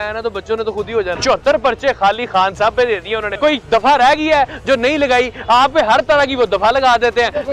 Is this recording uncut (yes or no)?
no